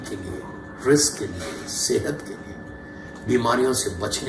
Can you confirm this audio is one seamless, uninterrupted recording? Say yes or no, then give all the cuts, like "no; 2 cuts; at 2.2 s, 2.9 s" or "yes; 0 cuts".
yes; 0 cuts